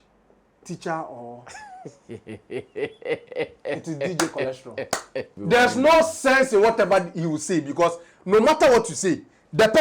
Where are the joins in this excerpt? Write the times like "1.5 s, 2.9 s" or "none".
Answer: 5.3 s